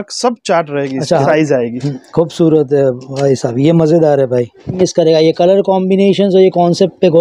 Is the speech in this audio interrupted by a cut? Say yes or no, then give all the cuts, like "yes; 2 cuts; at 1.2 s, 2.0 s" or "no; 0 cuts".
yes; 2 cuts; at 1.3 s, 4.7 s